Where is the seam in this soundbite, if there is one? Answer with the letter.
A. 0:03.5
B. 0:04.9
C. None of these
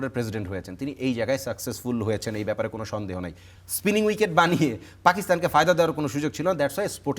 A